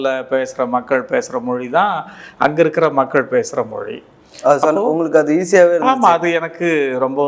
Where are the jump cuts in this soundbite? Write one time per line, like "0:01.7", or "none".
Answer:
none